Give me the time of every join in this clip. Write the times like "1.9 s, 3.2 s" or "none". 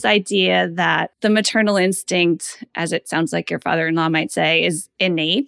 1.1 s

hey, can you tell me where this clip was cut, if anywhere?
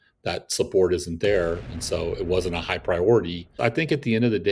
3.5 s

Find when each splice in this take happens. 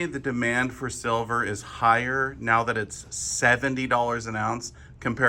none

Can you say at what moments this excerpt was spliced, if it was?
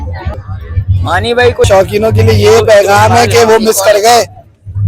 1.6 s

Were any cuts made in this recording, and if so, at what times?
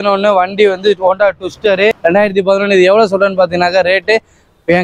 2.0 s

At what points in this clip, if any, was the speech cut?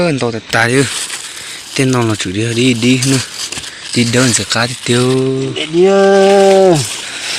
none

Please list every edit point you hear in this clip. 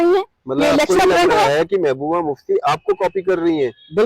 1.0 s

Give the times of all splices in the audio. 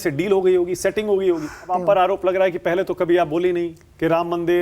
1.6 s

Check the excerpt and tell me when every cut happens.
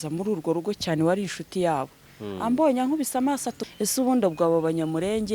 3.6 s

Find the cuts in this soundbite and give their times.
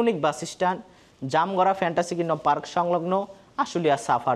none

